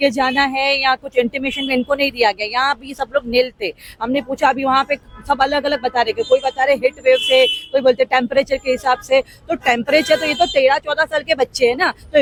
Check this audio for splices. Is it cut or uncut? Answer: uncut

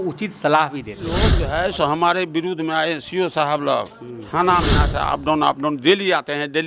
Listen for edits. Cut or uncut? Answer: cut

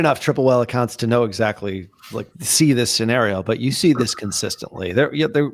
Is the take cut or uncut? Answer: uncut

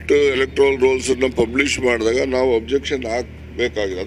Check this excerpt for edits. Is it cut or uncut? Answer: uncut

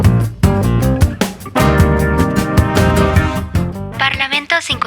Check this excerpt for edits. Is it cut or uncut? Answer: cut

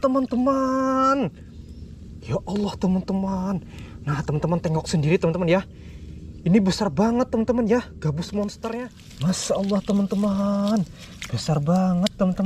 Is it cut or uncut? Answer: cut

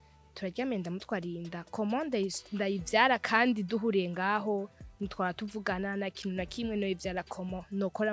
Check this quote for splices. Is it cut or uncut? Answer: uncut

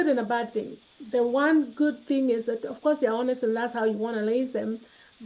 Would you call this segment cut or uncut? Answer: uncut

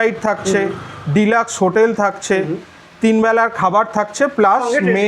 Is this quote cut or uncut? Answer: uncut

